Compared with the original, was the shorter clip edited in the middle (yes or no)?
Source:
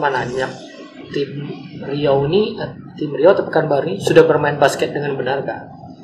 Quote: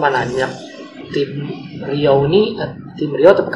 no